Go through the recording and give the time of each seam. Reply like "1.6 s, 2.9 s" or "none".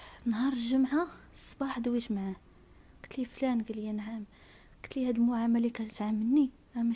none